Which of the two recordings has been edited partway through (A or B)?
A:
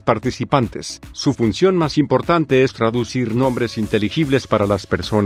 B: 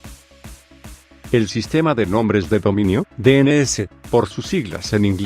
B